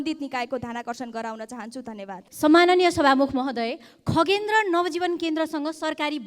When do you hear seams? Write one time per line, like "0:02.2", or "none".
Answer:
0:02.3